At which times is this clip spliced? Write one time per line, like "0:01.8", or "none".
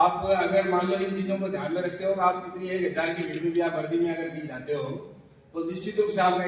none